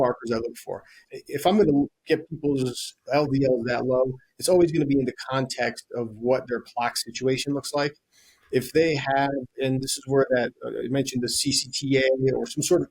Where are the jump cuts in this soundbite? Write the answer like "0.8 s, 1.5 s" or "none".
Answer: 1.0 s